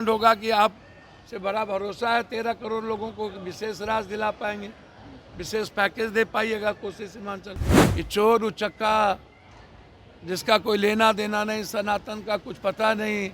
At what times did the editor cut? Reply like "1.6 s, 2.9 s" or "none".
7.7 s